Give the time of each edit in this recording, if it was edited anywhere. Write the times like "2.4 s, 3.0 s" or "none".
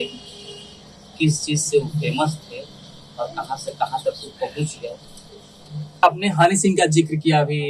6.0 s